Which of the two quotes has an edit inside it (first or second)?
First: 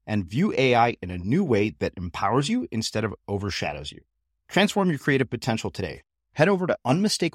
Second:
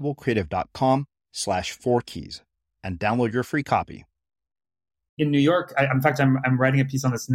second